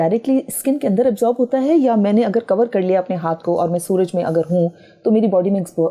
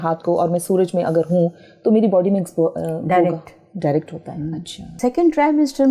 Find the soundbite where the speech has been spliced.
second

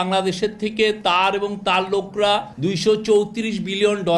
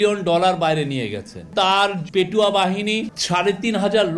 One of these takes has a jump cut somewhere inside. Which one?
second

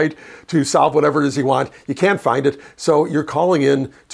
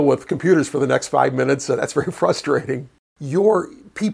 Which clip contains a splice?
second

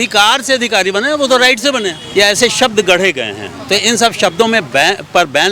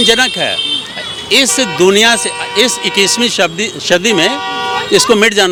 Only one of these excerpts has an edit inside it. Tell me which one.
first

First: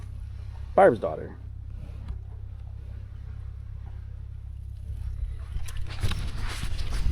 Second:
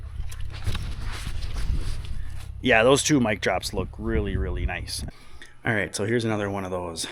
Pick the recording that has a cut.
second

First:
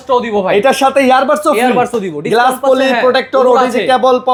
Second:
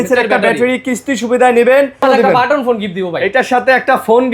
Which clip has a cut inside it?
second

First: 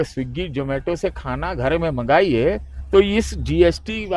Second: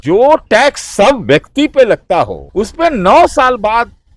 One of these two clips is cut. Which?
second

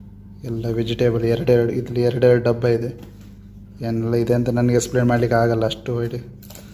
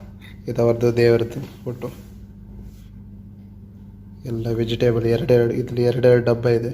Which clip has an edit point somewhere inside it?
second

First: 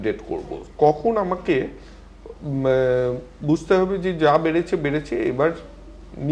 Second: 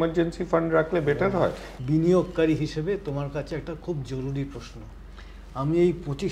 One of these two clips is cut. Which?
second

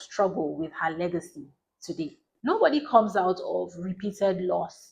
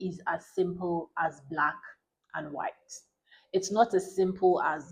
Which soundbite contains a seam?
first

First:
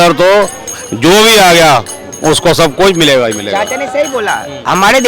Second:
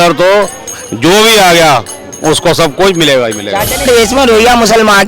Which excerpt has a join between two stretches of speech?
second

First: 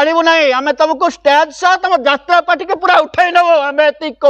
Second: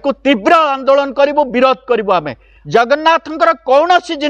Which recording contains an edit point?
second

